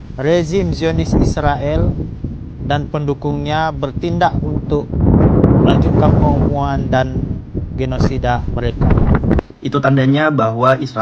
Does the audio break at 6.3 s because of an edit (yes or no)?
no